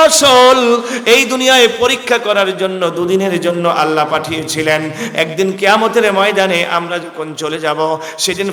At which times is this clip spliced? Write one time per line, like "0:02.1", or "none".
none